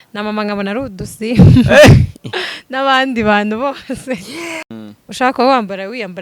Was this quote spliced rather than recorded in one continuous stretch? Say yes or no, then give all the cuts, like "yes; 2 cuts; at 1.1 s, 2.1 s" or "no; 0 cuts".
yes; 1 cut; at 4.6 s